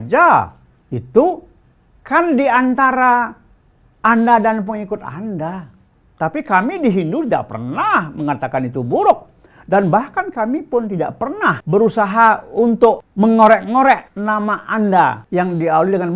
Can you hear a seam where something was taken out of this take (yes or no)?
yes